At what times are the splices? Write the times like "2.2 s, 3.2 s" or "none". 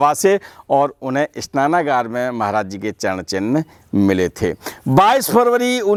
none